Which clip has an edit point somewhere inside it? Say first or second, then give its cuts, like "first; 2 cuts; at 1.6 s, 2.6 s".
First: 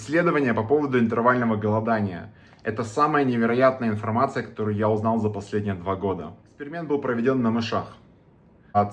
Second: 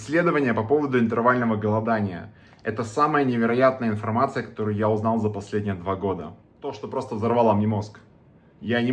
second; 1 cut; at 6.8 s